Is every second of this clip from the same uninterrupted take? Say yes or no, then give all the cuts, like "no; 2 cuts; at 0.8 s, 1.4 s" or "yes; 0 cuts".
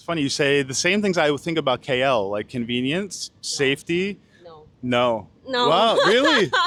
yes; 0 cuts